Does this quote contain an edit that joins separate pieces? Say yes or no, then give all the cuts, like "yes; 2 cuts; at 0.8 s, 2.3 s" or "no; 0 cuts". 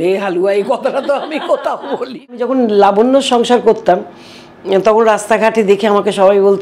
yes; 1 cut; at 2.4 s